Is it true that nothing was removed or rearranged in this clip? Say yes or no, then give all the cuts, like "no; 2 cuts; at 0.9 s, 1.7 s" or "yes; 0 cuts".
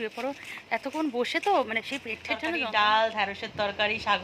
no; 1 cut; at 2.6 s